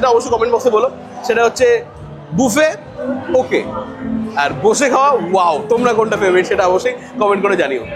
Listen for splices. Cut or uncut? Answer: uncut